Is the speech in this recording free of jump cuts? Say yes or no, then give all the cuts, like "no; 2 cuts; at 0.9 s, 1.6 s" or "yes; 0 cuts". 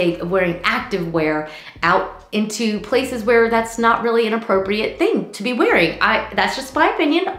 yes; 0 cuts